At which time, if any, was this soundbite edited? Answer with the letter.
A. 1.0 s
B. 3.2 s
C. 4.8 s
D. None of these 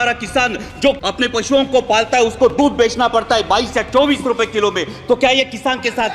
A